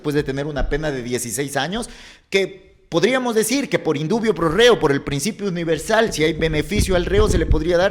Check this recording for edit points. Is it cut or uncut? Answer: uncut